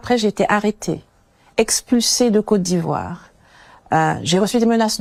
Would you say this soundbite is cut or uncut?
uncut